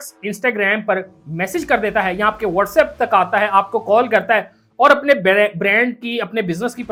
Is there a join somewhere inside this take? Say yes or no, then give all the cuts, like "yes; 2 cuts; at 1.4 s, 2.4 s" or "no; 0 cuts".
no; 0 cuts